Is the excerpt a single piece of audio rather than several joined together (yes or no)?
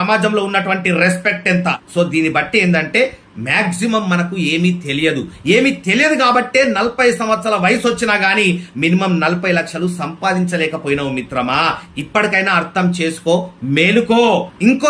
yes